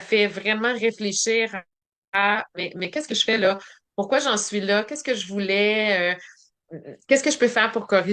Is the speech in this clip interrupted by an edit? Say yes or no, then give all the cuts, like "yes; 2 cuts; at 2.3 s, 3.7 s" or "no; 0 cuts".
no; 0 cuts